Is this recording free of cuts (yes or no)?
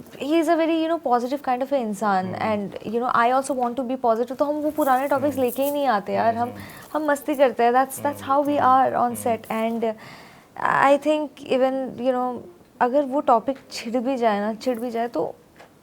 yes